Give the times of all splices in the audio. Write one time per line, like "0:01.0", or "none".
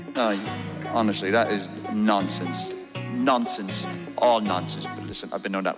none